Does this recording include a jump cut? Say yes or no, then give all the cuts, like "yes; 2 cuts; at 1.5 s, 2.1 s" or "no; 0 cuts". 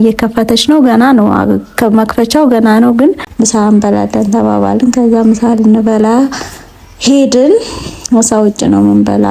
yes; 1 cut; at 3.3 s